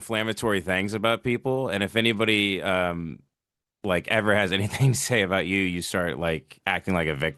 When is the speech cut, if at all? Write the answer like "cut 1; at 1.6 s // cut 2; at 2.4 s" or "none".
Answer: none